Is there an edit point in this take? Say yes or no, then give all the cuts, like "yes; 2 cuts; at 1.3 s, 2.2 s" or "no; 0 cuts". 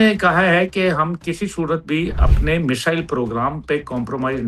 no; 0 cuts